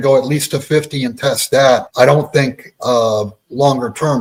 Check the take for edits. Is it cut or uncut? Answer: uncut